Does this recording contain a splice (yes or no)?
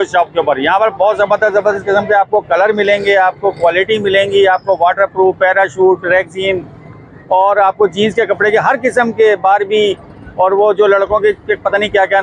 no